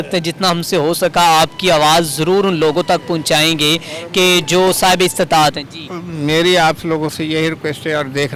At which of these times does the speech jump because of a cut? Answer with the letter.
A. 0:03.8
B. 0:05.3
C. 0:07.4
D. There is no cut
D